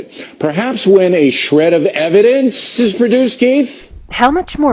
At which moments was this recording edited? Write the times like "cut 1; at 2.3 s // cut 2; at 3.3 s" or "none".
none